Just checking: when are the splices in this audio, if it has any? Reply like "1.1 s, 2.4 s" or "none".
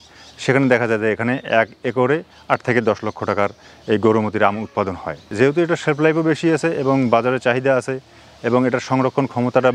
5.2 s